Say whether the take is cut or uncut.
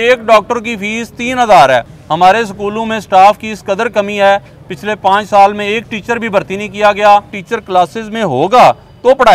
cut